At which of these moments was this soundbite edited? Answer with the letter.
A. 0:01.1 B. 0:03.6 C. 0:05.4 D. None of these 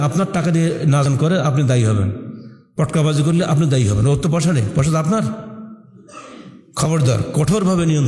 A